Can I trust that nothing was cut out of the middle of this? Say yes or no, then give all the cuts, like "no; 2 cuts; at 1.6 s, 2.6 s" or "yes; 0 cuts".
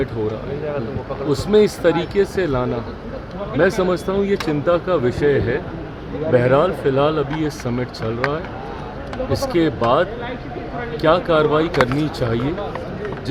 yes; 0 cuts